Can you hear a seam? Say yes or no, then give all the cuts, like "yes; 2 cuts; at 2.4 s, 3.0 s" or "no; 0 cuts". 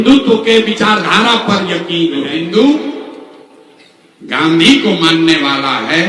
yes; 1 cut; at 2.2 s